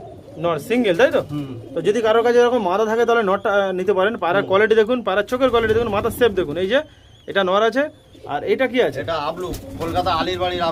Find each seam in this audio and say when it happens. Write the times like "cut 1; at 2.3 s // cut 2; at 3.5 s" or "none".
none